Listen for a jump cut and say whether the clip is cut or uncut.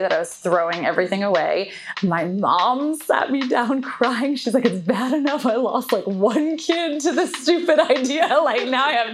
cut